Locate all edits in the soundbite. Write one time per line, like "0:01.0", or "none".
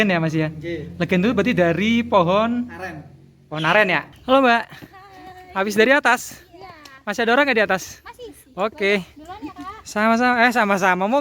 0:04.1